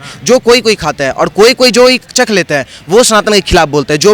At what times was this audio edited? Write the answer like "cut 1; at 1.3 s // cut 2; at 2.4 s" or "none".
none